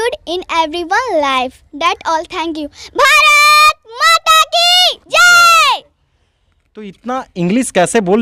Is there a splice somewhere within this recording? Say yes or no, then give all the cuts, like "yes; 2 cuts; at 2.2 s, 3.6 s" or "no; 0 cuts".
no; 0 cuts